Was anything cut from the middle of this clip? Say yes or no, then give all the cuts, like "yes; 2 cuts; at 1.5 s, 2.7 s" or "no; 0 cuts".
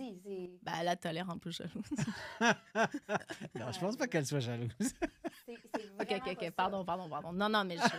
no; 0 cuts